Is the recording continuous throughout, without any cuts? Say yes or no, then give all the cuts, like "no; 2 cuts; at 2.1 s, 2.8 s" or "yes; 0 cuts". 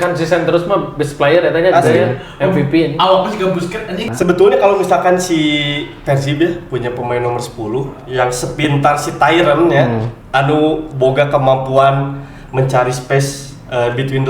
no; 1 cut; at 4.1 s